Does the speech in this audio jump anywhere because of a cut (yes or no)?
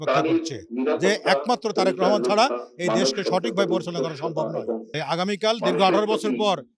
yes